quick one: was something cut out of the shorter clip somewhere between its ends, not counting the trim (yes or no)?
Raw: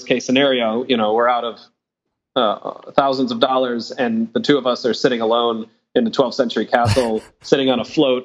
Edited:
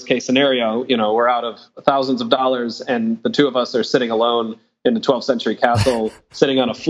yes